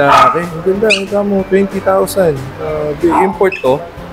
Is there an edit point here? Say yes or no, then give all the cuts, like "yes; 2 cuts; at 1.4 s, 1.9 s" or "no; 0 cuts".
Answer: no; 0 cuts